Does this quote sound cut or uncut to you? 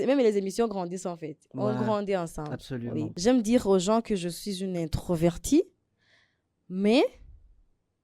cut